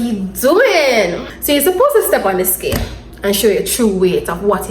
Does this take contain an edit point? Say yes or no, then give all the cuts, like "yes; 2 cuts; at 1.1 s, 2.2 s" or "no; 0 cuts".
yes; 1 cut; at 1.3 s